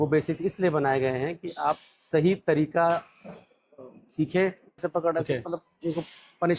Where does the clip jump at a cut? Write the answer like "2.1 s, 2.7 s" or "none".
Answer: 4.8 s